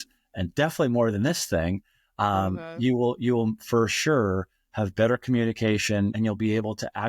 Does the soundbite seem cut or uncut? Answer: cut